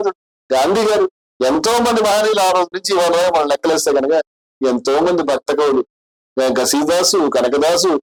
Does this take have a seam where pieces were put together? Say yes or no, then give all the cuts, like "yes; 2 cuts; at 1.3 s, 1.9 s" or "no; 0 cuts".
no; 0 cuts